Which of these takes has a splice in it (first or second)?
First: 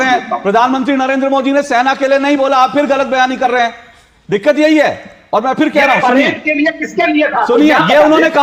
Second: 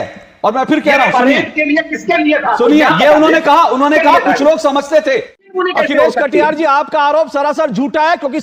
second